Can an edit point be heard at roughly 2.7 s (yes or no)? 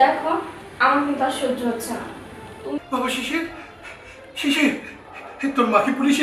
yes